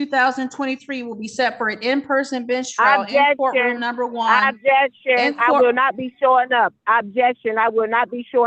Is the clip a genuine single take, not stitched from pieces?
yes; 0 cuts

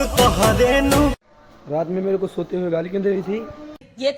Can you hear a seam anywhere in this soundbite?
yes; 1 cut; at 1.3 s

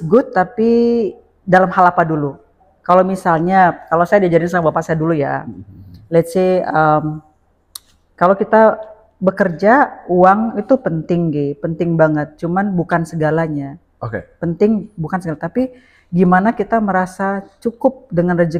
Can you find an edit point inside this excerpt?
no; 0 cuts

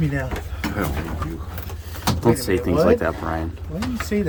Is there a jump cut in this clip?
no; 0 cuts

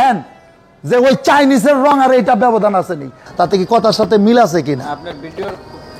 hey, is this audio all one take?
no; 1 cut; at 3.2 s

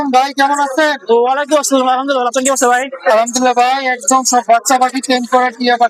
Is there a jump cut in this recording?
no; 0 cuts

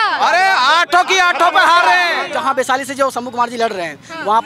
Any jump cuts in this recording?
yes; 1 cut; at 2.2 s

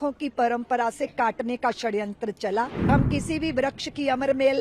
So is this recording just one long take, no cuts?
no; 1 cut; at 2.9 s

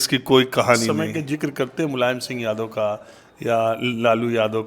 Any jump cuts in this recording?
yes; 1 cut; at 1.0 s

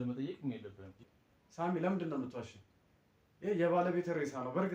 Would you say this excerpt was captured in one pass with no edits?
no; 1 cut; at 1.0 s

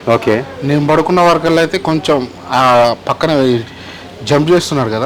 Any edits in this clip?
no; 0 cuts

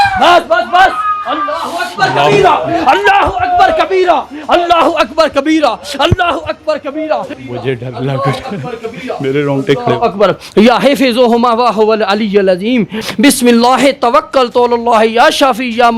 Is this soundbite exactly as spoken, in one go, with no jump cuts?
no; 2 cuts; at 7.3 s, 13.0 s

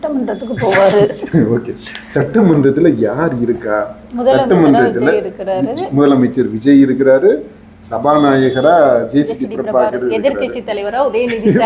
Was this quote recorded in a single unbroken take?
yes; 0 cuts

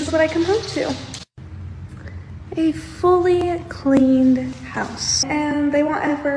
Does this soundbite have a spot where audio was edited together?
yes; 1 cut; at 5.3 s

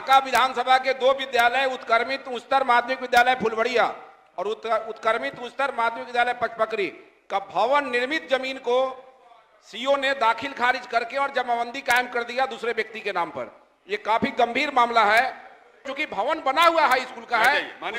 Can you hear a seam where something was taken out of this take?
yes; 1 cut; at 15.9 s

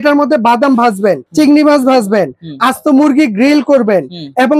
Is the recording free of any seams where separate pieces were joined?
no; 1 cut; at 1.2 s

